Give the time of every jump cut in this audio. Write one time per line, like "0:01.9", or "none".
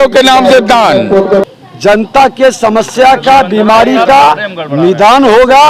0:01.4

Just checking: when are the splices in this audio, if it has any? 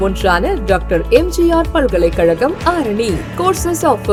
none

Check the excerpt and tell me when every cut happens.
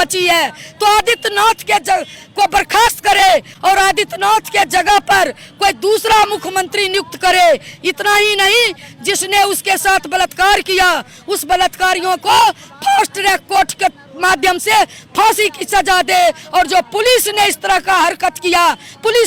none

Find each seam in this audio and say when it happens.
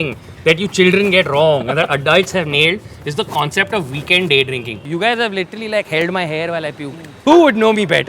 0:04.8
0:07.1

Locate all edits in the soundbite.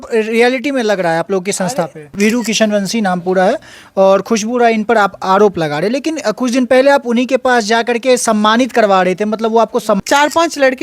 0:02.1
0:10.0

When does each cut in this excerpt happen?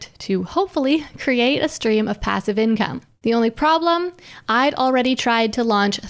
0:03.0

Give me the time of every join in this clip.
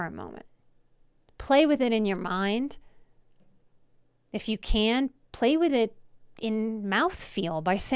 none

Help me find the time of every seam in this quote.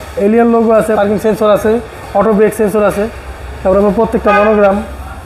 0:01.0

